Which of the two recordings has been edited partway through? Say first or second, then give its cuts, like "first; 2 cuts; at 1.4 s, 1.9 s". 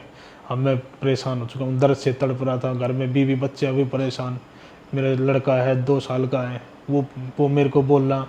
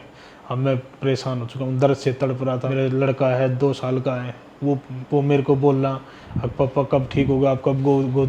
second; 1 cut; at 2.7 s